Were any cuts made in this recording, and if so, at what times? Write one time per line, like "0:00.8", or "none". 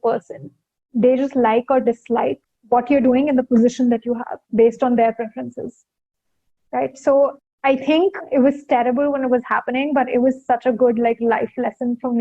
0:02.5
0:07.9